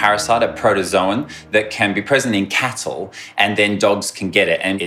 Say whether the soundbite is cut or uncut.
uncut